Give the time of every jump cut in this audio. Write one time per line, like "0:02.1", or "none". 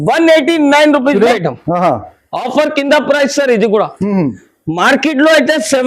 0:01.3